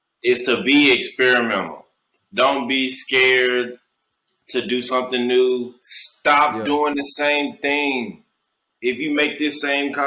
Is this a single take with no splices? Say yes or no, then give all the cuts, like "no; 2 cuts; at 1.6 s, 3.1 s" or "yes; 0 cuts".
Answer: yes; 0 cuts